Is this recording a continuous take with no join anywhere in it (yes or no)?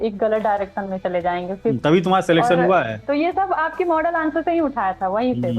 no